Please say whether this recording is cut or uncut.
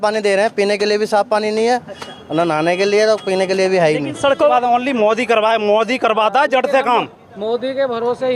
cut